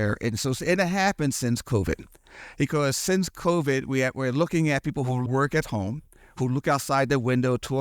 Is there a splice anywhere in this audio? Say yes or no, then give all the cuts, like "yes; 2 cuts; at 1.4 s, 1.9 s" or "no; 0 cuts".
yes; 1 cut; at 5.3 s